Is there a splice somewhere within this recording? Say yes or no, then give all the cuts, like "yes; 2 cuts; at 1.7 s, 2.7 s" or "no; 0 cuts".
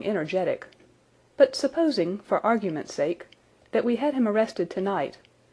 yes; 1 cut; at 2.4 s